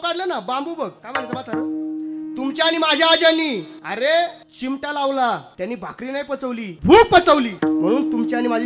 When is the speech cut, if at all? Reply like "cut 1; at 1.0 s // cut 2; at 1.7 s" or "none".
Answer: cut 1; at 1.0 s // cut 2; at 3.8 s // cut 3; at 4.5 s // cut 4; at 5.5 s // cut 5; at 6.7 s // cut 6; at 7.5 s